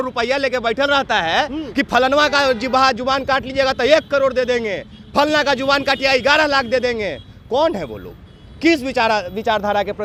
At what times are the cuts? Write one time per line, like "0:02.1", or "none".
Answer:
none